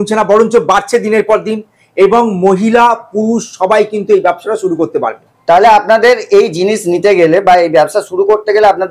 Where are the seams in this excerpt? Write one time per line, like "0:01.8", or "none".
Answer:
none